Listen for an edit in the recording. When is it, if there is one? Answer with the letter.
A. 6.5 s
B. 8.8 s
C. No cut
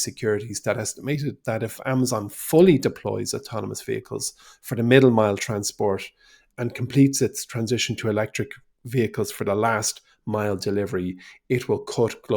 A